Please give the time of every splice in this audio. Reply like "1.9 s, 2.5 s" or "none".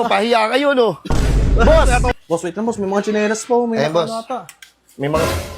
2.1 s